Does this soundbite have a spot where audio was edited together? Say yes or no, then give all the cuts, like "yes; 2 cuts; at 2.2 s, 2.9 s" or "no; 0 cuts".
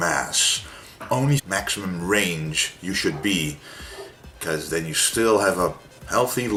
no; 0 cuts